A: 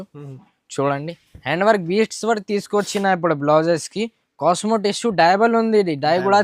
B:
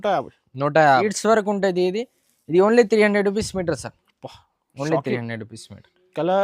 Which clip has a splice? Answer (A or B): B